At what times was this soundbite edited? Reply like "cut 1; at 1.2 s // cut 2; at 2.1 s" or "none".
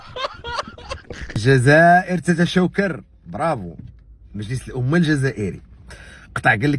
cut 1; at 1.4 s